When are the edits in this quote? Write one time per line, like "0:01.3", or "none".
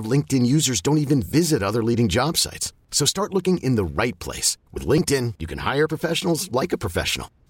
none